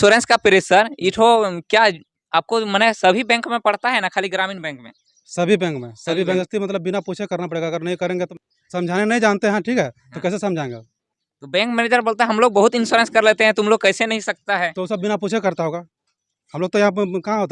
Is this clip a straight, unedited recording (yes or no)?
no